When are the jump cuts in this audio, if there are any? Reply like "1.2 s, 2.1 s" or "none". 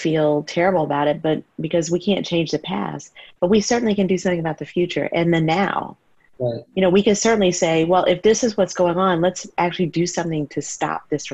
none